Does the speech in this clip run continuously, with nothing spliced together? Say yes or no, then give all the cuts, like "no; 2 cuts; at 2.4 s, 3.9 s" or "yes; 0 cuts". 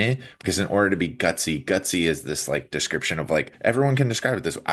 no; 1 cut; at 3.5 s